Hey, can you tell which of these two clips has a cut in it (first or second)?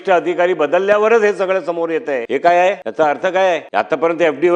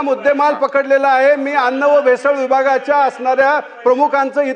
first